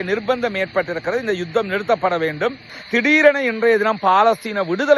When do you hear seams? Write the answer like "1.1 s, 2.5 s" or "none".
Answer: 2.7 s